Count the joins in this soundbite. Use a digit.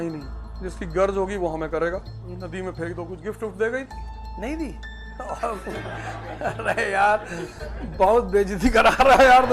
1